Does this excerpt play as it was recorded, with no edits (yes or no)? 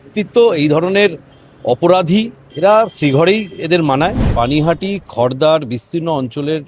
no